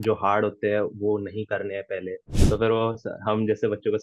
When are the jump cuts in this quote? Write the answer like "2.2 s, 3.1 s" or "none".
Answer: 2.3 s